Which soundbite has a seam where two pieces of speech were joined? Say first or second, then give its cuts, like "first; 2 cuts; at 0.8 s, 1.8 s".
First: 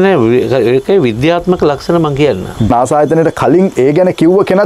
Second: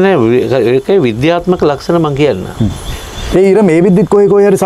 first; 1 cut; at 2.7 s